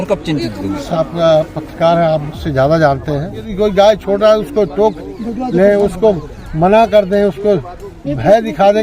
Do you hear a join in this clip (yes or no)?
yes